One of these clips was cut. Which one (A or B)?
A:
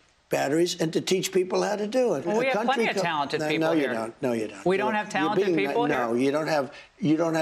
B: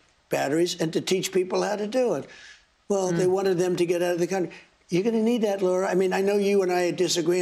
A